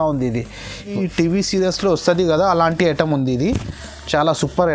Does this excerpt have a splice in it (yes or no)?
yes